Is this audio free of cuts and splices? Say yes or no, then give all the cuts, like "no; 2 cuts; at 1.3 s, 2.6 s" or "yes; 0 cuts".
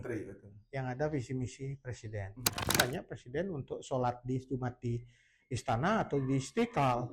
no; 1 cut; at 2.8 s